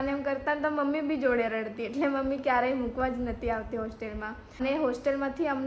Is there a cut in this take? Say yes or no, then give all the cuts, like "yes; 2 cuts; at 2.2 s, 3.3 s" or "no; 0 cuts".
yes; 1 cut; at 4.6 s